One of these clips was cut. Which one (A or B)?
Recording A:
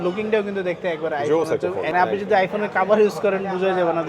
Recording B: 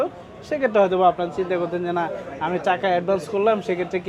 A